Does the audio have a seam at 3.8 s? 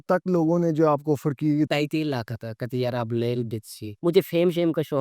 yes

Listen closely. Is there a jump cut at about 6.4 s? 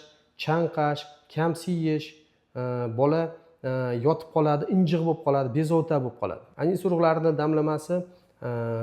yes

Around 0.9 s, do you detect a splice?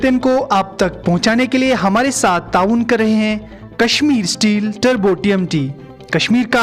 no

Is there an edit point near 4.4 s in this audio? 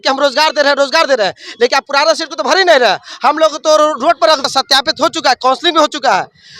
yes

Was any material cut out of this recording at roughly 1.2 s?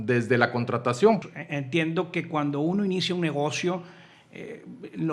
yes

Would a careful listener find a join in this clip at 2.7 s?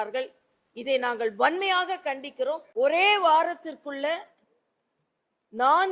yes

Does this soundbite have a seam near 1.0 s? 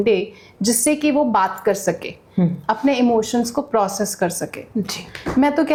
no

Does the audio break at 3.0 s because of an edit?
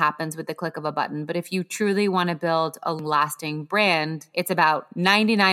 yes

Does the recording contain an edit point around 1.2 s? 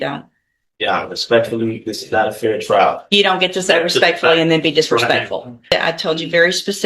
no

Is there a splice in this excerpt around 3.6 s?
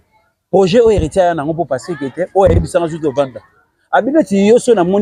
no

